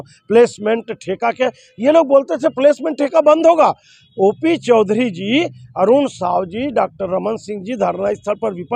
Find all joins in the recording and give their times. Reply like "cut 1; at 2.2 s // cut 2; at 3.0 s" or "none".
none